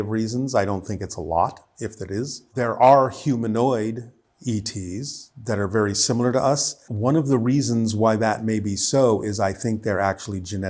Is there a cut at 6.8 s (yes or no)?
yes